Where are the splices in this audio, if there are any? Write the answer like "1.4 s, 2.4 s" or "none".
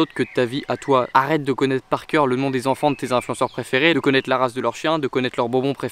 none